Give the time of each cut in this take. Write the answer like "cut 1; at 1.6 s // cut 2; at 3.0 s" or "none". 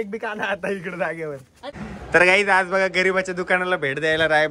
cut 1; at 1.5 s